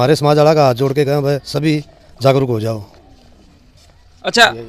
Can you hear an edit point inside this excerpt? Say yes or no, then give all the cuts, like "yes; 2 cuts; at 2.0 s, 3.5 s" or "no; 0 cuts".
no; 0 cuts